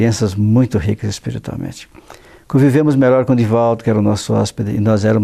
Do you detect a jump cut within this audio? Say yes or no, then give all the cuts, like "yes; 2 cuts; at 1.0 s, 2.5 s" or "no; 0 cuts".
no; 0 cuts